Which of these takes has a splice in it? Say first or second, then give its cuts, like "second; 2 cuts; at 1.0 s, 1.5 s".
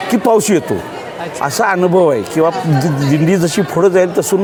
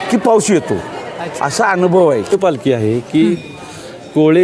second; 1 cut; at 2.3 s